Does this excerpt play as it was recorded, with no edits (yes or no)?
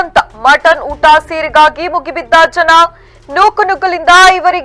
yes